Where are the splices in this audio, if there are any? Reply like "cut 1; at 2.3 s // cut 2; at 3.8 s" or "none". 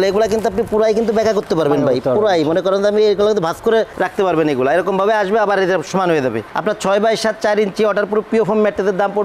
cut 1; at 6.5 s